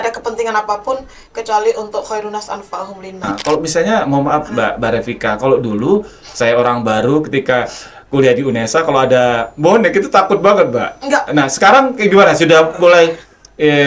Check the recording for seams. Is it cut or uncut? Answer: cut